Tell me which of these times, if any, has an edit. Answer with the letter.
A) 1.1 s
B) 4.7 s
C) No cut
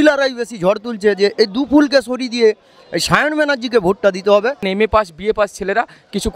B